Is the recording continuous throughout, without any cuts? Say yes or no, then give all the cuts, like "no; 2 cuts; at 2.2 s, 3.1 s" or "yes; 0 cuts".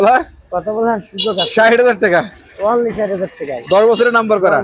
yes; 0 cuts